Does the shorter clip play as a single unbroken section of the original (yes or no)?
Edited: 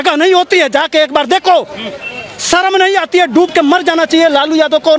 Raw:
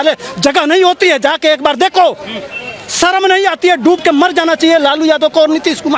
yes